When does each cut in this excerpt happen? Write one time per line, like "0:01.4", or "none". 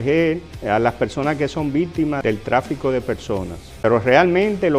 0:03.6

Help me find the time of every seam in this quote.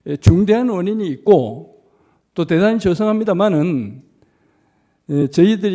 none

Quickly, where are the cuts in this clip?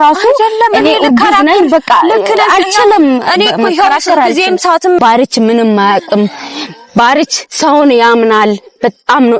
0:05.0

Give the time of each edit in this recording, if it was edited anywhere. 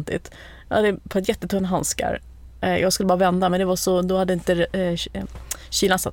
none

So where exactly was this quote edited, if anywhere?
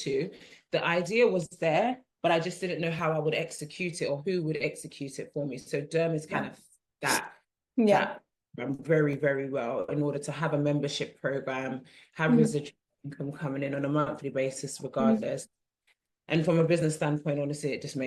none

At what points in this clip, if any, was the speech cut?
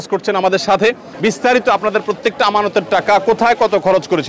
0:01.1

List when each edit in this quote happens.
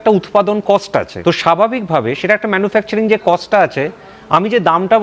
0:01.1

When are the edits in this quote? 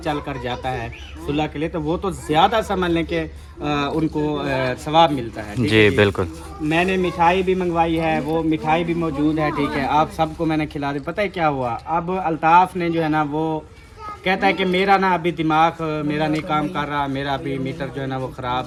none

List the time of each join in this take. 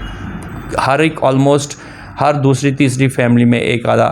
none

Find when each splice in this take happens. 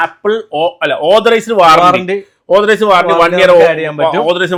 none

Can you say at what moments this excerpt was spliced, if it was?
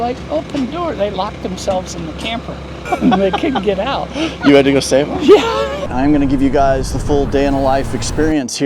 0:02.7
0:05.8

